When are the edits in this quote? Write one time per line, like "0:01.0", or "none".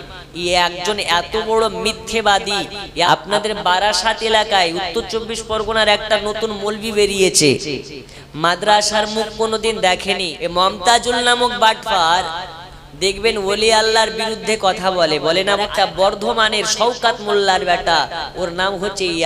0:03.1
0:10.3
0:15.6